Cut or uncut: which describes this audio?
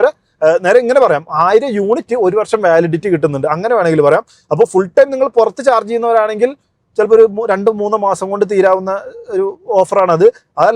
uncut